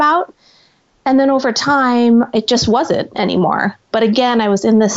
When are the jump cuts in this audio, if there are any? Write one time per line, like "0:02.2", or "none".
0:02.3
0:03.9